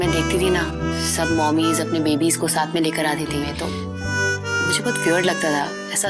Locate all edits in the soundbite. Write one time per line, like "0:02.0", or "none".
0:03.5